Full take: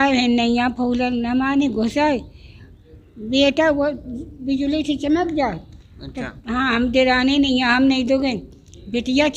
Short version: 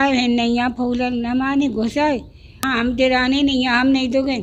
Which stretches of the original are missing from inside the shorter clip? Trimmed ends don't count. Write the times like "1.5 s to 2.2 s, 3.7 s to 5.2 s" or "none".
2.5 s to 6.5 s